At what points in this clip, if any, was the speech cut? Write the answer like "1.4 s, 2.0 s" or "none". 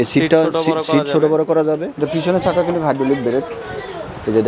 1.9 s